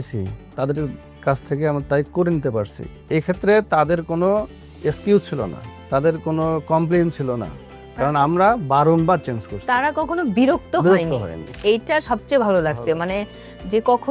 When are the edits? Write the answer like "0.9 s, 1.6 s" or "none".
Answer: none